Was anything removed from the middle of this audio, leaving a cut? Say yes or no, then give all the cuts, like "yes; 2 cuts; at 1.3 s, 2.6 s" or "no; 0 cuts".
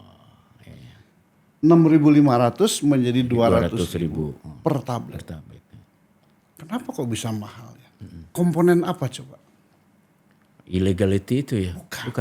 no; 0 cuts